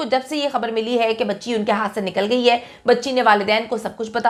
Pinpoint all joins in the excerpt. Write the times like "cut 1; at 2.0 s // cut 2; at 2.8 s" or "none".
none